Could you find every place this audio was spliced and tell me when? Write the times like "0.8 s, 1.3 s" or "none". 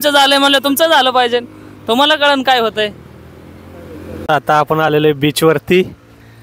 4.1 s

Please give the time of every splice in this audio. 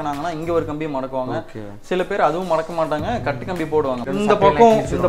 4.1 s

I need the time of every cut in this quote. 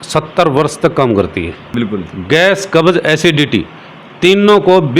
1.6 s

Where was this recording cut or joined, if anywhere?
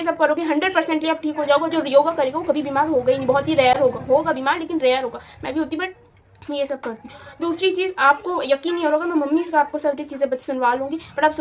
none

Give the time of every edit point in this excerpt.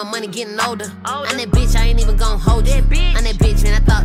none

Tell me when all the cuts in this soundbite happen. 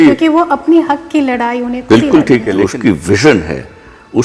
2.6 s

